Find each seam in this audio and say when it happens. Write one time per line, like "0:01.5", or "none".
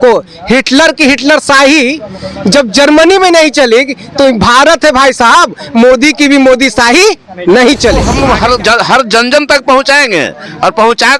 0:08.1

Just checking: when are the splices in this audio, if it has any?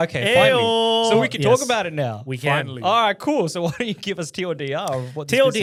none

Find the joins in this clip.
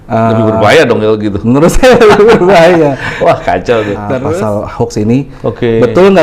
0:04.2

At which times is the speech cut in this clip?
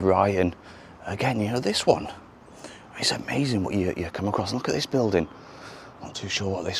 none

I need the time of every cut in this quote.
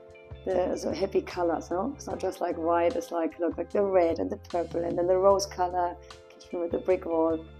none

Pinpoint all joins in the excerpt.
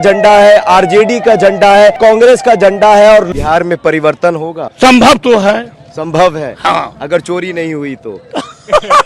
0:02.0
0:03.3
0:04.6

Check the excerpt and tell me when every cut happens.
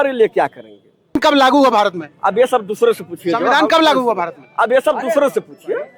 0:01.2

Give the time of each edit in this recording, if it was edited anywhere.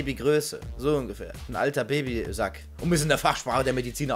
none

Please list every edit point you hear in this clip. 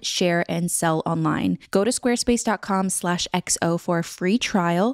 0:01.6

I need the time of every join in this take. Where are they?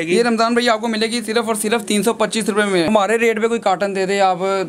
0:02.9

